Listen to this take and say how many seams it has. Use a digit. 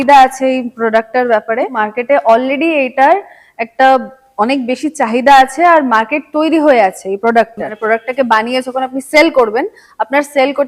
2